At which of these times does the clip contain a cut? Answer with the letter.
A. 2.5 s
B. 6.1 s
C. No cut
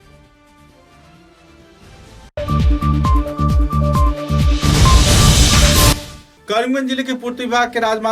B